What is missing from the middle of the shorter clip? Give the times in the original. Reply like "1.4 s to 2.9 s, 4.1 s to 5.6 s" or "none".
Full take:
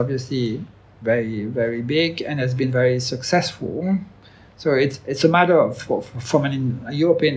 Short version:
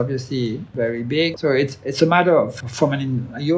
0.9 s to 4.1 s, 5.8 s to 6.1 s